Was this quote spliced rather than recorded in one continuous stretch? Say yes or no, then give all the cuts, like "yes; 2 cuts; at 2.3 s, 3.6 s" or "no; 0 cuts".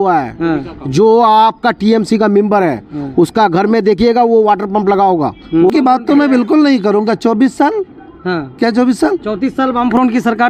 yes; 1 cut; at 5.7 s